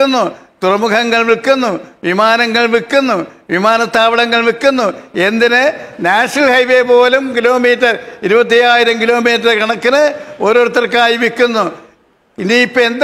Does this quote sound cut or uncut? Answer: uncut